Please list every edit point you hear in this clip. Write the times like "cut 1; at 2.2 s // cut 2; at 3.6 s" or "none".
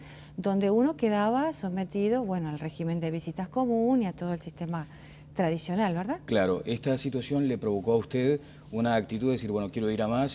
none